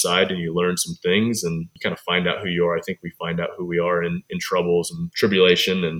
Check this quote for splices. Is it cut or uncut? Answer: uncut